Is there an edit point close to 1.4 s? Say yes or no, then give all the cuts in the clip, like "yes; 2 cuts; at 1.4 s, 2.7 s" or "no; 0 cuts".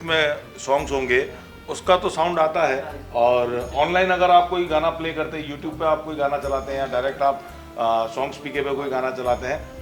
no; 0 cuts